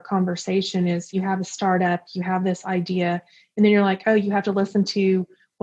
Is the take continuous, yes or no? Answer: no